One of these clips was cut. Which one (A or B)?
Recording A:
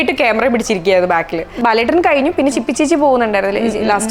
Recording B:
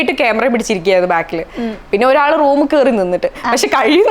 A